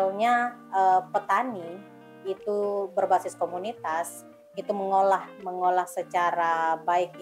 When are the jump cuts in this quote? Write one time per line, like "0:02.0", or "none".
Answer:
none